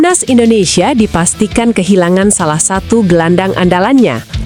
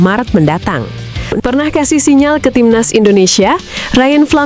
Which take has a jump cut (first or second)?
second